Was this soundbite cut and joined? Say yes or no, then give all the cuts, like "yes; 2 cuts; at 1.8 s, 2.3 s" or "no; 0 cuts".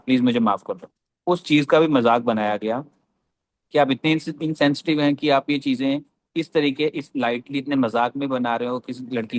no; 0 cuts